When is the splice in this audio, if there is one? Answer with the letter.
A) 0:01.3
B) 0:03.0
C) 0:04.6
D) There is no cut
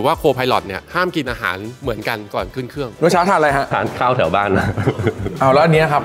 B